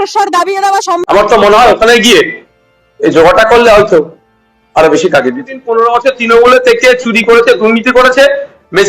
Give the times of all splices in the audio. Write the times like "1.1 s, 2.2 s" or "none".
1.0 s